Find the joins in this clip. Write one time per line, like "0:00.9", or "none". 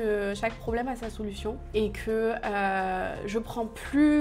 none